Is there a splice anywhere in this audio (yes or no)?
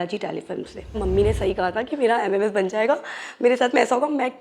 yes